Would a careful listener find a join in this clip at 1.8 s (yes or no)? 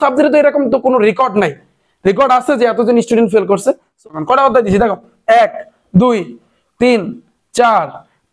no